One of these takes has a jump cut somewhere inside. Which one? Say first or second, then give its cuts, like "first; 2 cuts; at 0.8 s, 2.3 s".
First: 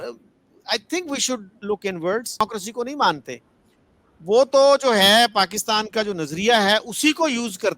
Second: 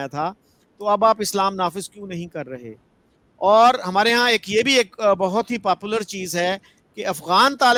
first; 1 cut; at 2.4 s